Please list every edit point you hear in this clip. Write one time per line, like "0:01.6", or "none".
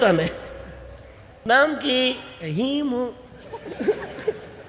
0:01.4

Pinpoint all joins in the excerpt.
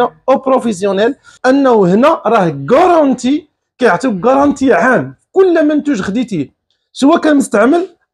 0:01.3

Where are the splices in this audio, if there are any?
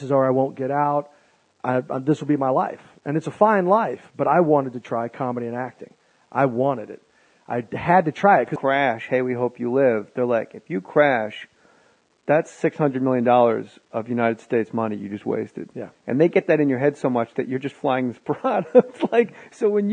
none

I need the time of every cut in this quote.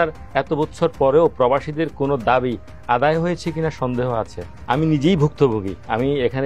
0:04.5

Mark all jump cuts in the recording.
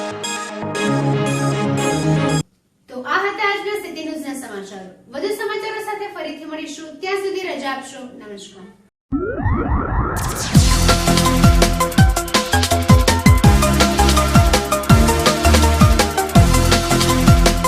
none

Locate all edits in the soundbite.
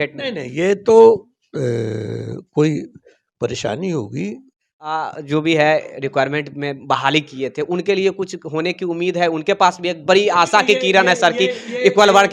0:05.0

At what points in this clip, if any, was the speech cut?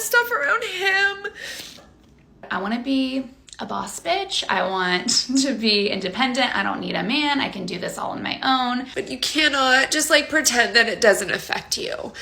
0:02.5
0:08.9

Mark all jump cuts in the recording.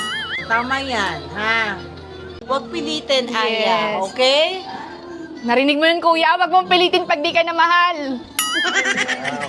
none

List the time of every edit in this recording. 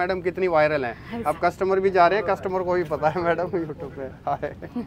none

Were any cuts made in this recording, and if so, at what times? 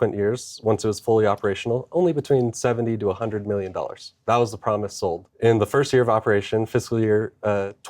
0:05.3

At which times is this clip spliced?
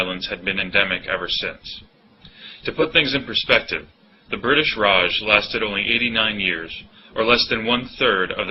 0:01.6

